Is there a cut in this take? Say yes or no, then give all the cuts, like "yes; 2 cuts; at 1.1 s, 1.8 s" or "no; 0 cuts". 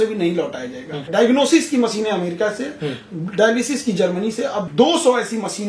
yes; 2 cuts; at 1.1 s, 4.7 s